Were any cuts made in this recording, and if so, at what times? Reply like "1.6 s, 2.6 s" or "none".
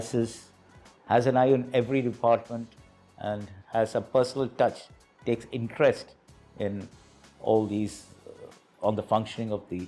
none